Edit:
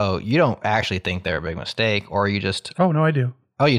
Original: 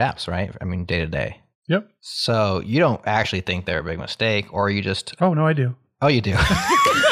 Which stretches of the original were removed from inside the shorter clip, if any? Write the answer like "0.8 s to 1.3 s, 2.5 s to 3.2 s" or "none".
none